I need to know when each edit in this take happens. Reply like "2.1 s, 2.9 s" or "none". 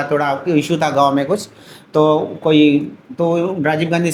none